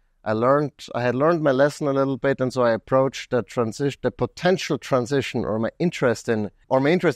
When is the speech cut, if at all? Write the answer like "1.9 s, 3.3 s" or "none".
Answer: none

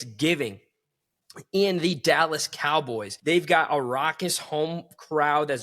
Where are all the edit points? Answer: 3.1 s

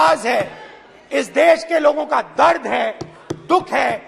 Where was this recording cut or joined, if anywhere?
none

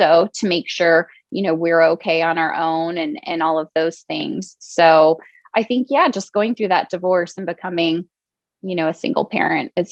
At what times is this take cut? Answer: none

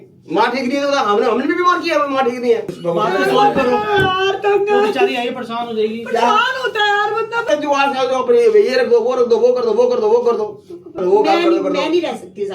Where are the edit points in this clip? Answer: 2.8 s, 5.9 s, 7.4 s, 11.0 s

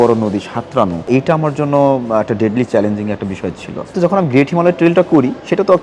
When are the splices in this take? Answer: 1.1 s, 3.9 s

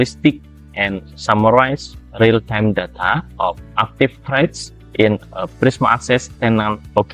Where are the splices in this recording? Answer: none

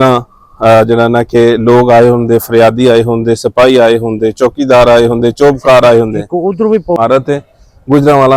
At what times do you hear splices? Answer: 7.0 s

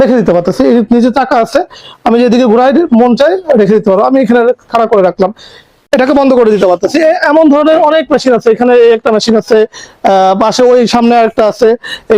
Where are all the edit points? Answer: 5.8 s

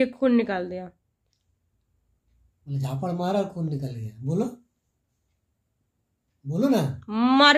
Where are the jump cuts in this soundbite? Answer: none

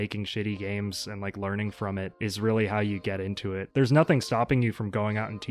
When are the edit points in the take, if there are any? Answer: 2.1 s, 3.6 s

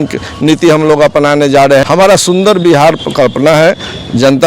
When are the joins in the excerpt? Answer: 1.8 s

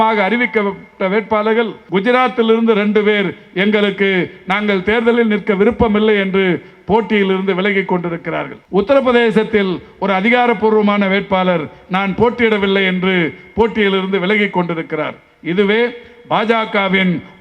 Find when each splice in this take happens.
1.8 s, 8.5 s

